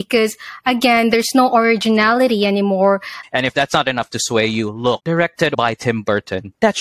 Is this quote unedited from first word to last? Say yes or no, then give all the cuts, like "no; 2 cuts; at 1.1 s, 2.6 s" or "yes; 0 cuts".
no; 2 cuts; at 3.2 s, 5.5 s